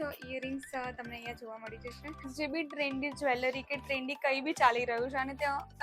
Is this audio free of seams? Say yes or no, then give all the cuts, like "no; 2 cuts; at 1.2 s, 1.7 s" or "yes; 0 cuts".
no; 1 cut; at 2.3 s